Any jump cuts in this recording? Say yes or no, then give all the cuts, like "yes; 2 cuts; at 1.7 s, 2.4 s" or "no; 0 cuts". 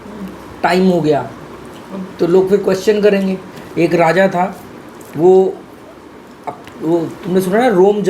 yes; 1 cut; at 3.5 s